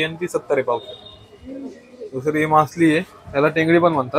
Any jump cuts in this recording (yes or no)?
no